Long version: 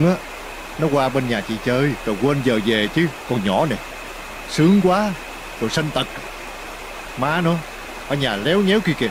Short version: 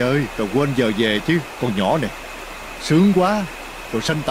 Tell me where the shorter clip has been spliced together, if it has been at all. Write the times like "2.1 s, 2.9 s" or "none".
none